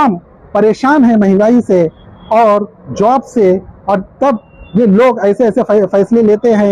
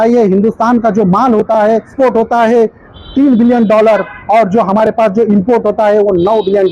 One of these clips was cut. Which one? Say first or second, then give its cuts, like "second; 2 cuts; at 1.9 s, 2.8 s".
second; 1 cut; at 1.9 s